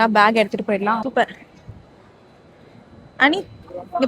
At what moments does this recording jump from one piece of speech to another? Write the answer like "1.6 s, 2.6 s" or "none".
1.0 s